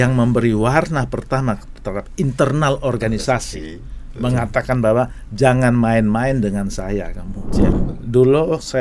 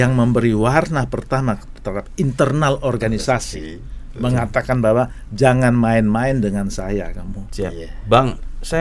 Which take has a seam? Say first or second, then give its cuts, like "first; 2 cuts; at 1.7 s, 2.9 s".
first; 1 cut; at 7.8 s